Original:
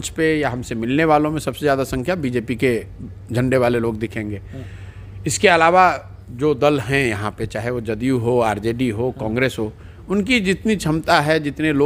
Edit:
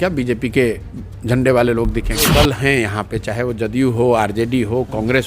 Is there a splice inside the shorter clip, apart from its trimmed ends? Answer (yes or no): yes